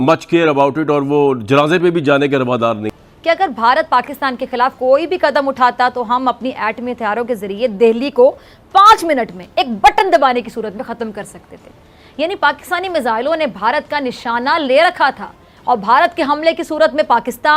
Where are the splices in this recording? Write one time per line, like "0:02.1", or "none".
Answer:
0:02.9